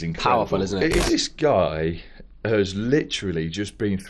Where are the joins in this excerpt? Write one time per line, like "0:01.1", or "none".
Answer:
0:01.0